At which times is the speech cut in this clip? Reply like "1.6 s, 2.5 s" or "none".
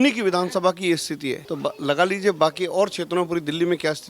1.4 s